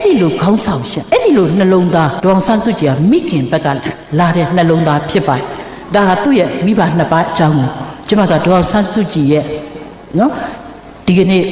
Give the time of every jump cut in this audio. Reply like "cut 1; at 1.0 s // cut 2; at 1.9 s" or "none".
cut 1; at 0.9 s // cut 2; at 2.1 s